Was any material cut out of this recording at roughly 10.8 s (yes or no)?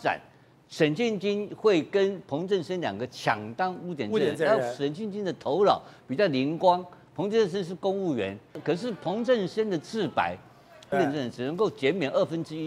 yes